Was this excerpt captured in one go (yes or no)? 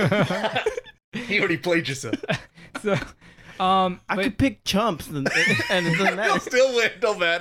yes